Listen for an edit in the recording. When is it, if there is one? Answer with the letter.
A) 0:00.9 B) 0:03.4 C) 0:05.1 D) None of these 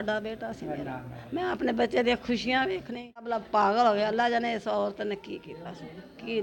B